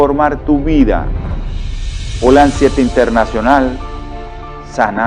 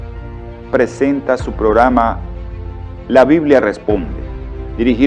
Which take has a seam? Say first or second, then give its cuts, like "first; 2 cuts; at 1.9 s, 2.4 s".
second; 1 cut; at 1.0 s